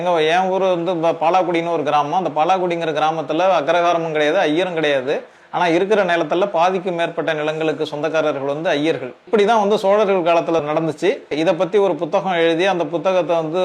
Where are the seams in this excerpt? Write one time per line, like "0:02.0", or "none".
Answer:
0:09.2
0:10.9